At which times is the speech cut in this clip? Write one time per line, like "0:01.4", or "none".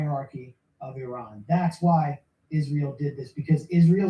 0:01.1
0:02.3

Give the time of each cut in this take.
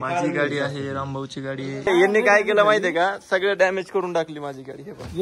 0:01.9

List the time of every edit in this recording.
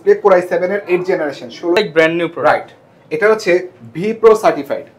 0:01.8

